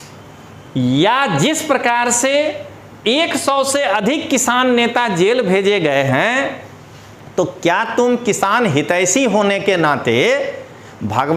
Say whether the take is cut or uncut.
uncut